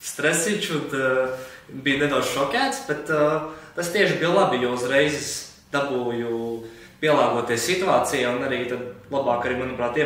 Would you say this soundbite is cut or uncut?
uncut